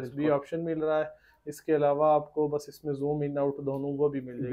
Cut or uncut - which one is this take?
uncut